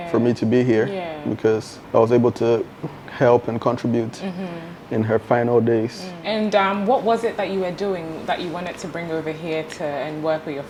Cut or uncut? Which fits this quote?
uncut